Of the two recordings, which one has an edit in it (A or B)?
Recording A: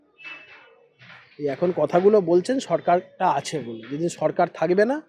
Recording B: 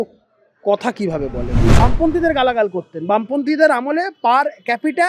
B